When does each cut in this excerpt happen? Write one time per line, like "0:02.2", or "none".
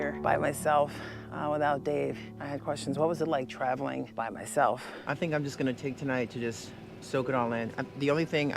0:02.4
0:04.9